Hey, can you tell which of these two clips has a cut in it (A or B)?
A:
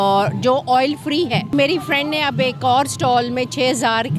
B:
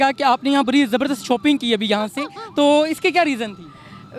A